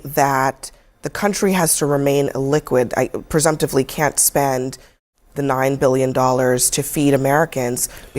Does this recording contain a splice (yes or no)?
no